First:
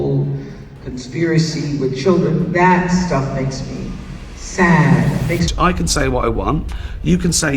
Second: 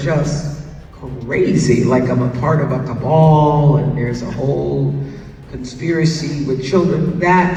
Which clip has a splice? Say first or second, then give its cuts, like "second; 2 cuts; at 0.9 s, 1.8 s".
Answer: first; 1 cut; at 5.5 s